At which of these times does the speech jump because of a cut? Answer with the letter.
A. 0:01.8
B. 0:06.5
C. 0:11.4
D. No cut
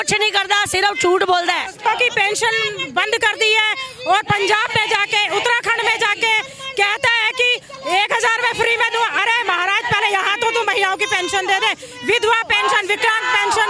A